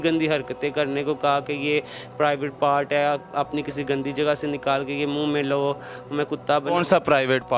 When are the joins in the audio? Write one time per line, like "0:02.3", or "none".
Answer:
none